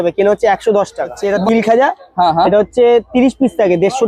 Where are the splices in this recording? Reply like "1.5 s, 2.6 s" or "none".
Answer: 1.3 s